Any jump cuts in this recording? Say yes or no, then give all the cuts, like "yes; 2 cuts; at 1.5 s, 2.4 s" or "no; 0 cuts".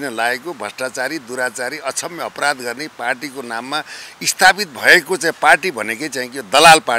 no; 0 cuts